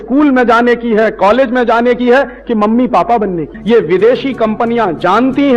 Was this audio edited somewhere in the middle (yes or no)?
yes